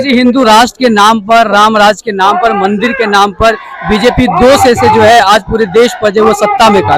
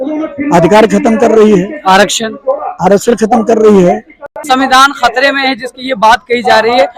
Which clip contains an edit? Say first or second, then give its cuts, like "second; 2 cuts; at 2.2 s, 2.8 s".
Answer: second; 1 cut; at 4.4 s